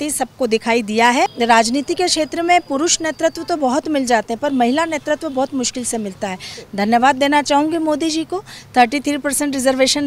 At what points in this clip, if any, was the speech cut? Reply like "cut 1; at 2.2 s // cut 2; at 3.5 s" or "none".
cut 1; at 1.3 s // cut 2; at 6.6 s

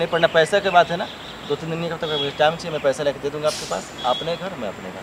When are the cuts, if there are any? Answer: none

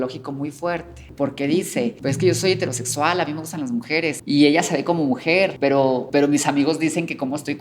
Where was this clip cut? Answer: cut 1; at 1.0 s // cut 2; at 2.0 s // cut 3; at 4.2 s // cut 4; at 5.9 s

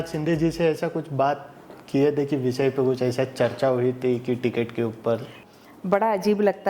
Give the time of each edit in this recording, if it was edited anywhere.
cut 1; at 5.4 s

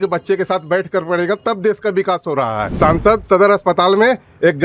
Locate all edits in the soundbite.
cut 1; at 2.7 s

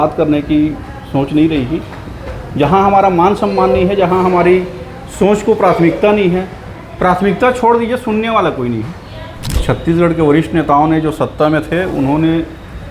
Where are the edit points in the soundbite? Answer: cut 1; at 9.6 s

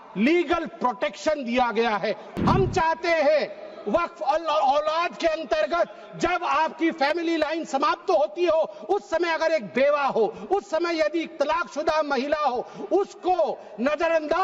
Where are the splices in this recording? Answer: cut 1; at 2.3 s

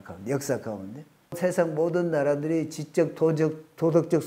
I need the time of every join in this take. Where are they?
cut 1; at 1.4 s

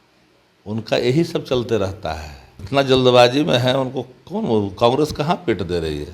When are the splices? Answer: cut 1; at 2.6 s

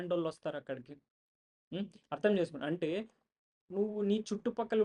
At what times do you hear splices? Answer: none

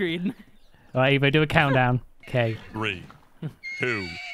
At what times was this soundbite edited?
cut 1; at 2.2 s

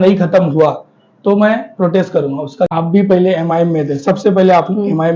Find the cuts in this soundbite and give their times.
cut 1; at 2.7 s

